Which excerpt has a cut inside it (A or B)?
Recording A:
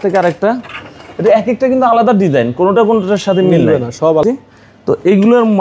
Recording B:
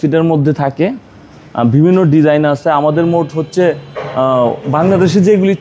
A